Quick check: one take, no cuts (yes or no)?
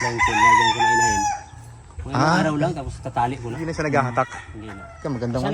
no